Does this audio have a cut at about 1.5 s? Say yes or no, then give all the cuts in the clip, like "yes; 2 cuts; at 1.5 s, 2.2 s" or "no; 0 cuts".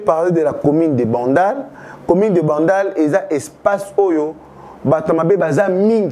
no; 0 cuts